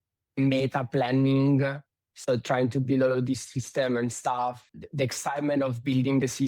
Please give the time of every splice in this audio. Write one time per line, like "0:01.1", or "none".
0:04.6